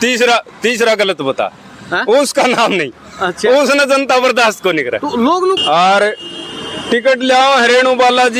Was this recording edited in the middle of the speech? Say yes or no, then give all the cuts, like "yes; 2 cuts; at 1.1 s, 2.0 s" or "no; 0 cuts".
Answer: yes; 1 cut; at 5.6 s